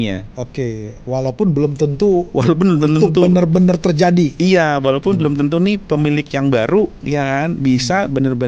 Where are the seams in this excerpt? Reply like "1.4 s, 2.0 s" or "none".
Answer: none